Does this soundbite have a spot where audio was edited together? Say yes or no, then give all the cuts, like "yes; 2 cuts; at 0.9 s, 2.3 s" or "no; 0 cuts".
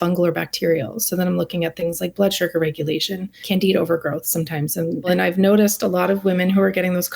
yes; 2 cuts; at 3.4 s, 5.1 s